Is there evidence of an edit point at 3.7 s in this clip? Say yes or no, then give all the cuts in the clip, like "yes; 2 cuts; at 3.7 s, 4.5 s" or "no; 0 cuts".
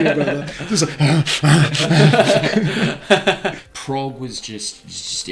yes; 1 cut; at 3.7 s